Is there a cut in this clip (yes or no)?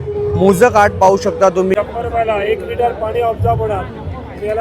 yes